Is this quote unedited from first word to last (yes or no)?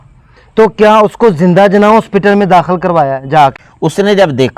no